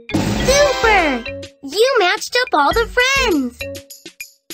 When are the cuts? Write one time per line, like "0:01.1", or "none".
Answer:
0:03.6